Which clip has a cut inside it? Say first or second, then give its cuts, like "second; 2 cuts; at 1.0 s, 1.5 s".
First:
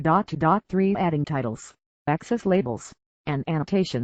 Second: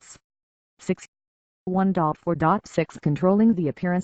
second; 2 cuts; at 0.9 s, 2.6 s